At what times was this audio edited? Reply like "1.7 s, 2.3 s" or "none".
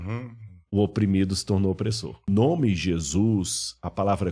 2.3 s